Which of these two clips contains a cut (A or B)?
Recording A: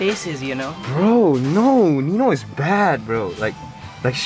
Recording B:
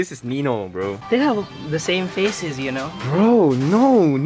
B